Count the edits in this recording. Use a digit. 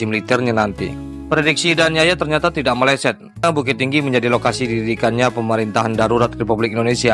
2